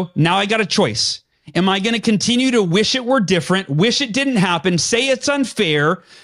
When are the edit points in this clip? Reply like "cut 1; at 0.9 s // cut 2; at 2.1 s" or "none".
none